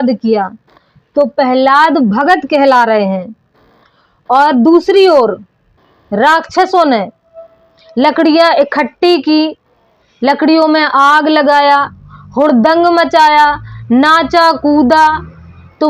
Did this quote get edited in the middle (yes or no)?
no